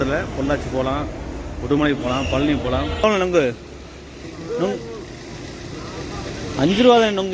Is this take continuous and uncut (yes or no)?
no